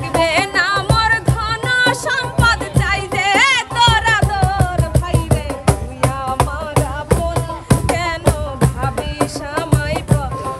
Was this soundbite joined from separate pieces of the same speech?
no; 0 cuts

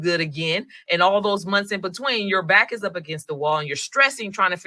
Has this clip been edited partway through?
no; 0 cuts

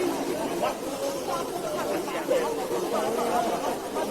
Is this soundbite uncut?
yes; 0 cuts

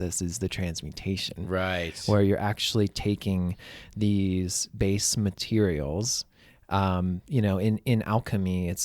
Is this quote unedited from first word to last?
yes; 0 cuts

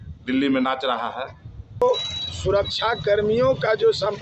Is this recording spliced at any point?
yes; 1 cut; at 1.8 s

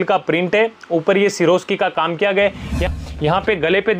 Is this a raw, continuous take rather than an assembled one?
no; 1 cut; at 2.9 s

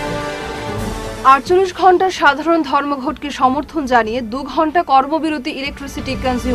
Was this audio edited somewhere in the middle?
no; 0 cuts

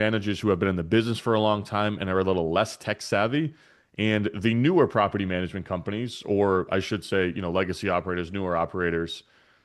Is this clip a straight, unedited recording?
yes; 0 cuts

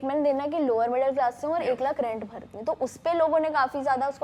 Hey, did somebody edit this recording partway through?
no; 0 cuts

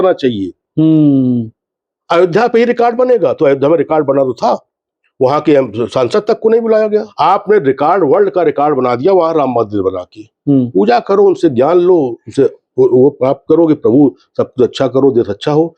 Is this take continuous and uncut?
no; 1 cut; at 7.1 s

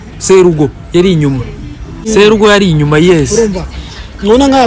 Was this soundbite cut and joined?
yes; 1 cut; at 2.1 s

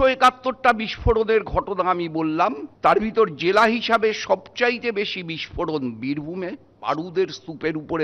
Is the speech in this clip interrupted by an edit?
yes; 2 cuts; at 2.7 s, 6.8 s

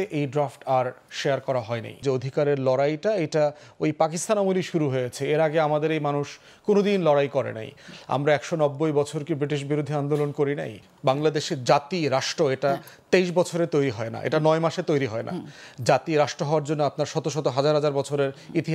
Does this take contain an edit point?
yes; 2 cuts; at 2.0 s, 10.8 s

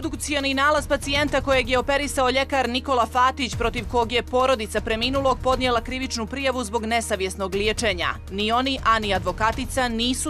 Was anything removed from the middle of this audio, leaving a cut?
no; 0 cuts

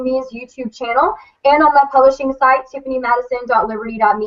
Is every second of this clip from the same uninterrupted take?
yes; 0 cuts

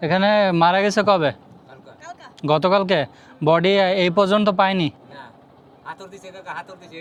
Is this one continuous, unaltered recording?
yes; 0 cuts

